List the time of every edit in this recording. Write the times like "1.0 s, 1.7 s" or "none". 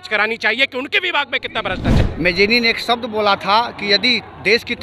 2.0 s